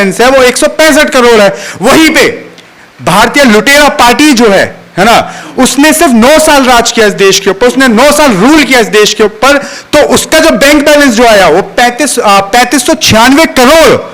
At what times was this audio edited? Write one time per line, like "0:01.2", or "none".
none